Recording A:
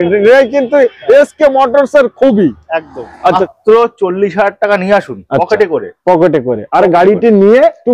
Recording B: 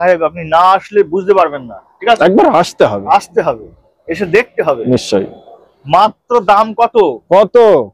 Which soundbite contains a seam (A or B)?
A